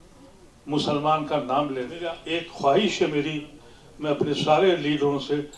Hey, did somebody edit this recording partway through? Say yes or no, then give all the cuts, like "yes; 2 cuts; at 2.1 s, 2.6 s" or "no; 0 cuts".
yes; 1 cut; at 2.1 s